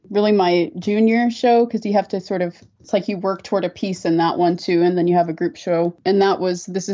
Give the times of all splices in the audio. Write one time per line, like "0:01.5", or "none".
0:02.8